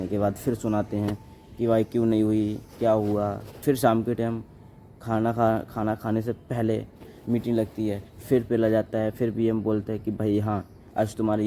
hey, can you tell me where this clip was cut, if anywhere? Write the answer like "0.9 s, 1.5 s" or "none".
3.5 s